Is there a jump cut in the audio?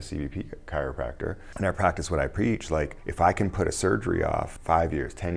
yes; 3 cuts; at 1.4 s, 3.0 s, 4.5 s

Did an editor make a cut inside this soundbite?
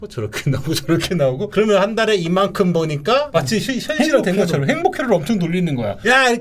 yes; 2 cuts; at 1.5 s, 3.3 s

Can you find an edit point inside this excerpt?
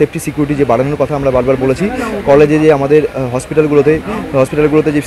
no; 0 cuts

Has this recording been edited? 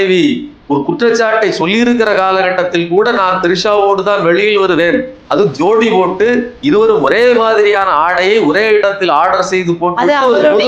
no; 0 cuts

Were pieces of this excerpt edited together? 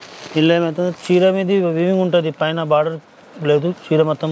no; 0 cuts

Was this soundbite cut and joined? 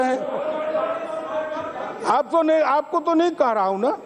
no; 0 cuts

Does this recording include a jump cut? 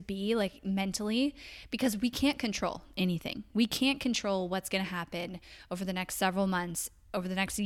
no; 0 cuts

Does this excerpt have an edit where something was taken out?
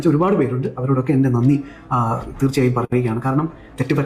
no; 0 cuts

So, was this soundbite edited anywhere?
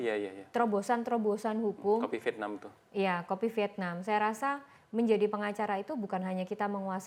no; 0 cuts

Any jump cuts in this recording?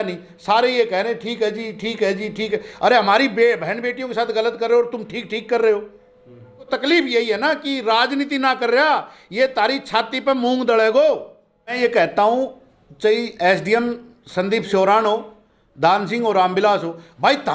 yes; 2 cuts; at 6.7 s, 11.8 s

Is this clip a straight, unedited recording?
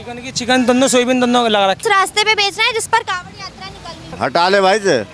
no; 2 cuts; at 1.8 s, 4.1 s

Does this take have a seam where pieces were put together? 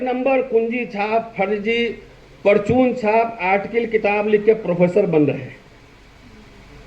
no; 0 cuts

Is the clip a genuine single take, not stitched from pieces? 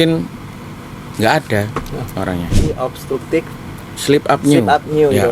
no; 1 cut; at 2.6 s

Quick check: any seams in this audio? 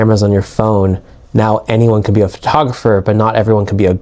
no; 0 cuts

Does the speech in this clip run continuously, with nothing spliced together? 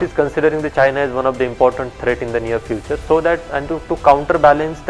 yes; 0 cuts

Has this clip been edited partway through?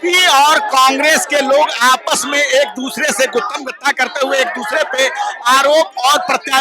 no; 0 cuts

